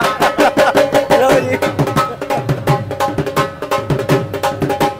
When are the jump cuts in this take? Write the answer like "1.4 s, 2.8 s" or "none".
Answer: none